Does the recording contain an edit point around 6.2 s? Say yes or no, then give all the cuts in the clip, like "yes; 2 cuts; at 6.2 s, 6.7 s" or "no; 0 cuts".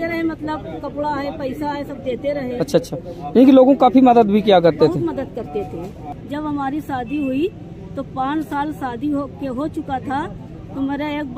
yes; 1 cut; at 6.2 s